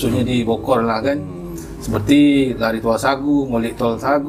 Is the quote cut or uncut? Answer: uncut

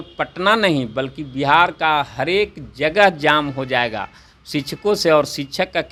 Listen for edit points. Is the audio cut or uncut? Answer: uncut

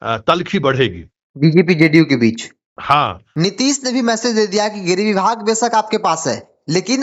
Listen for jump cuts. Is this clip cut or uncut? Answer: cut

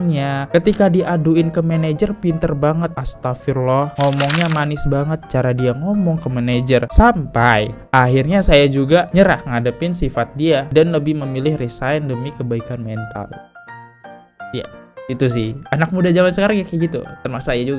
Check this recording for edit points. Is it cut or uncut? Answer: uncut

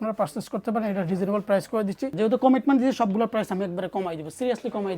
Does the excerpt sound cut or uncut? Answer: cut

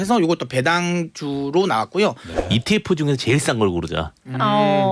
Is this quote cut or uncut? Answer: cut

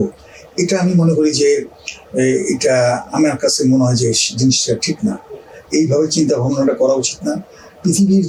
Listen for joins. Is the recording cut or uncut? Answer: uncut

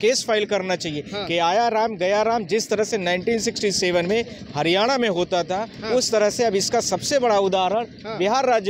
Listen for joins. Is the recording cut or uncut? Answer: uncut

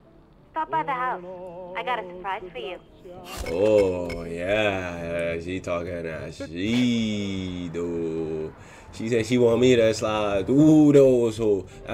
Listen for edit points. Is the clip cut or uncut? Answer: uncut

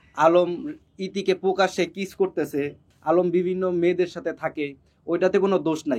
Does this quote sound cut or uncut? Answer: cut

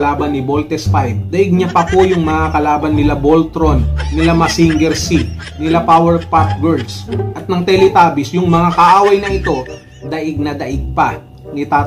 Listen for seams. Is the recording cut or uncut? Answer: uncut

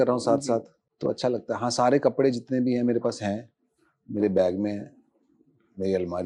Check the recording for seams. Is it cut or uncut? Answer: uncut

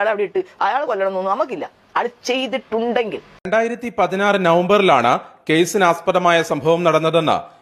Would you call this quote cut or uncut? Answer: cut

